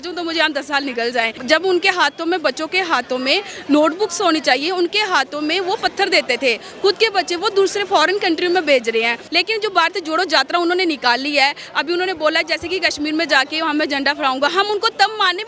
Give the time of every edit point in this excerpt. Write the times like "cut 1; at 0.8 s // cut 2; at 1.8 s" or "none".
cut 1; at 1.4 s // cut 2; at 9.2 s

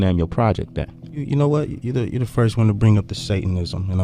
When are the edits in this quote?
cut 1; at 1.0 s

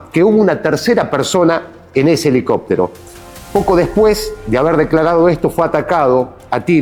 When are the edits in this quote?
none

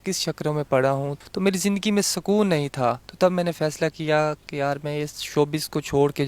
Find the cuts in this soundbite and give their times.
cut 1; at 1.3 s

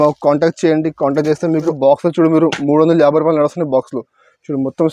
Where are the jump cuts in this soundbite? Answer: cut 1; at 1.7 s

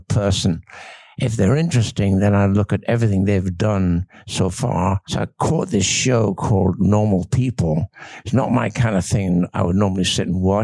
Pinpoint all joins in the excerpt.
cut 1; at 5.1 s

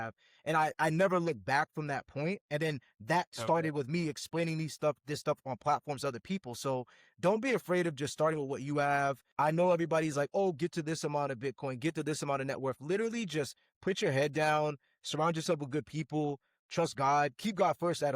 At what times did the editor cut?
cut 1; at 9.2 s

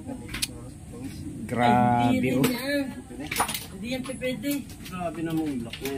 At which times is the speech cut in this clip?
none

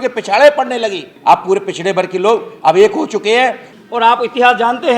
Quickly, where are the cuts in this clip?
cut 1; at 1.0 s // cut 2; at 3.6 s

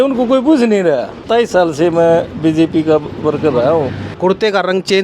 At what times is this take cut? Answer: cut 1; at 1.3 s // cut 2; at 4.0 s

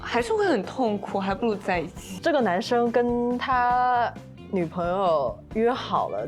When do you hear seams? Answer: cut 1; at 2.0 s

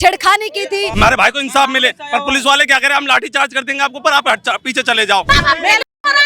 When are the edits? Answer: cut 1; at 0.9 s // cut 2; at 5.3 s

